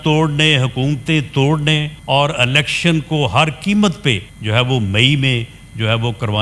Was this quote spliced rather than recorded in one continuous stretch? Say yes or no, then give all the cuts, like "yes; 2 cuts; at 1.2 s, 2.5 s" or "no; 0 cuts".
yes; 2 cuts; at 1.9 s, 4.3 s